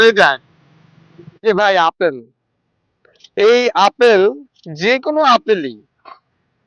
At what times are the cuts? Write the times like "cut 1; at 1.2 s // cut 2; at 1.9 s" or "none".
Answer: cut 1; at 1.3 s